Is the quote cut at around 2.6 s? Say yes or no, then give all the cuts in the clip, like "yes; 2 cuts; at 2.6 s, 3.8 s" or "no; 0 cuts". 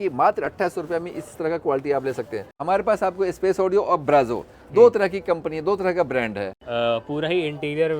yes; 2 cuts; at 2.6 s, 6.6 s